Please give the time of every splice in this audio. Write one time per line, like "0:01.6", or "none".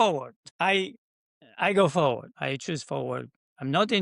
0:02.3